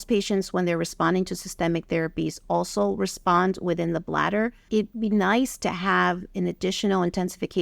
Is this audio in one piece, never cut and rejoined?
yes; 0 cuts

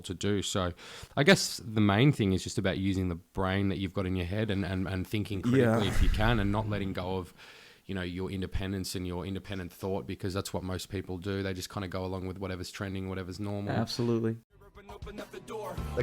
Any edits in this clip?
yes; 1 cut; at 14.4 s

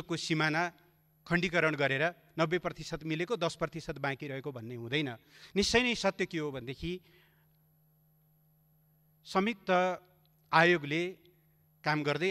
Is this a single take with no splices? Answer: yes; 0 cuts

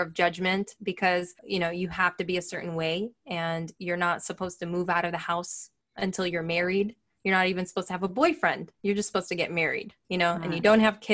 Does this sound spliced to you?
yes; 3 cuts; at 1.4 s, 8.7 s, 9.9 s

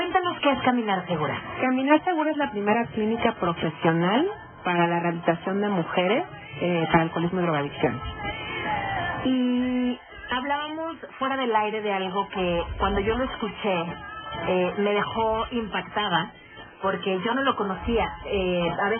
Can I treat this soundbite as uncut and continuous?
yes; 0 cuts

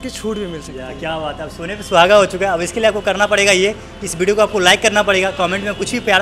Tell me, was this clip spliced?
no; 0 cuts

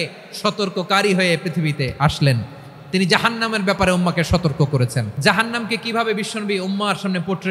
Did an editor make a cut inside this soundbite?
yes; 1 cut; at 5.1 s

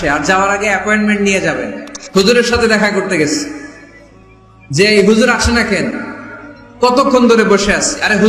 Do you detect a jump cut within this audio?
yes; 1 cut; at 1.9 s

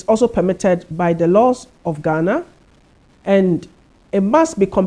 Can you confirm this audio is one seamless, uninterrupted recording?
yes; 0 cuts

